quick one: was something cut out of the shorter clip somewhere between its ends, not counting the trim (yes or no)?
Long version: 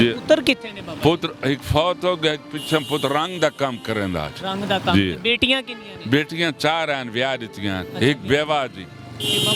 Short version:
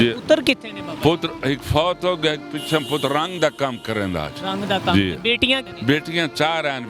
yes